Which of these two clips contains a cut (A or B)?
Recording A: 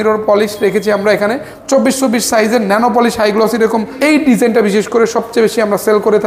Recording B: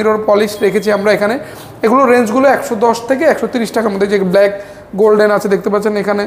A